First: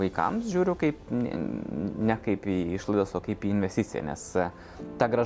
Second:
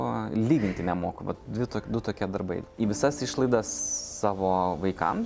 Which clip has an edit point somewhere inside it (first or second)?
second